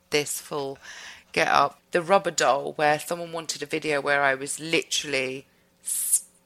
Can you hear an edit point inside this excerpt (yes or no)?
yes